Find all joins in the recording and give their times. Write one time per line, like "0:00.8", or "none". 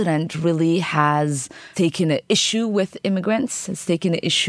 none